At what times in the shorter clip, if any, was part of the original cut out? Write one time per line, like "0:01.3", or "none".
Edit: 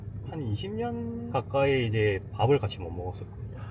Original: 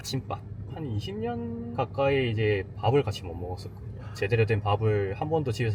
none